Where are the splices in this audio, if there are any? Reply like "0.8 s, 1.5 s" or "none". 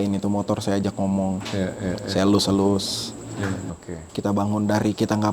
3.6 s